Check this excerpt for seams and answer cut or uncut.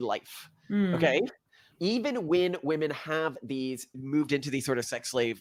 uncut